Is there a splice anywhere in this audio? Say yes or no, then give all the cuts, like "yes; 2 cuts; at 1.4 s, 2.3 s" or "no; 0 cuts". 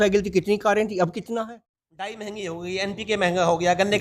yes; 1 cut; at 1.4 s